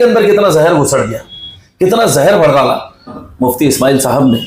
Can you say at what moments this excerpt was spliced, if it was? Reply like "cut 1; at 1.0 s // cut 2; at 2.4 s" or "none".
cut 1; at 3.2 s